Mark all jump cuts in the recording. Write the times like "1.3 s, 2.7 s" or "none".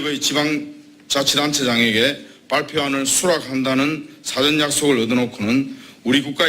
2.4 s